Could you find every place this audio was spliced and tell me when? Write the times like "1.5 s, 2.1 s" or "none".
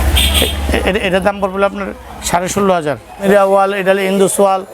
3.2 s